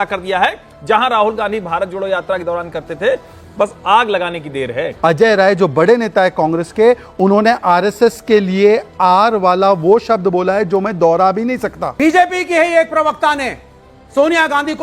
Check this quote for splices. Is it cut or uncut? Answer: cut